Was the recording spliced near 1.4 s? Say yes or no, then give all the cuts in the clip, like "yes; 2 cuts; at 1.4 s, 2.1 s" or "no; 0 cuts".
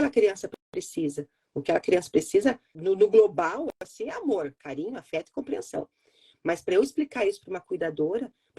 no; 1 cut; at 2.7 s